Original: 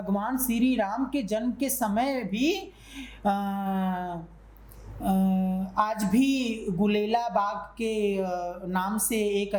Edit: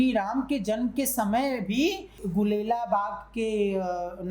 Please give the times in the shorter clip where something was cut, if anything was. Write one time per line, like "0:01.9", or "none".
0:02.2